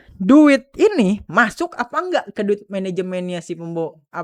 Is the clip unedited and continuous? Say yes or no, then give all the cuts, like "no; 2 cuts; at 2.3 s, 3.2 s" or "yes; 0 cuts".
yes; 0 cuts